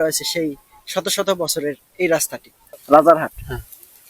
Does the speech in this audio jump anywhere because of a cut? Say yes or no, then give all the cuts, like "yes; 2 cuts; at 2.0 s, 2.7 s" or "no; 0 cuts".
yes; 1 cut; at 2.6 s